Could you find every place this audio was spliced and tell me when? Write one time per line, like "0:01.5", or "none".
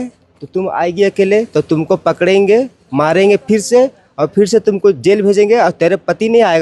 none